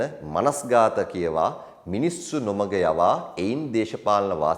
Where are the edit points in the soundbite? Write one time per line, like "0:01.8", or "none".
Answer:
none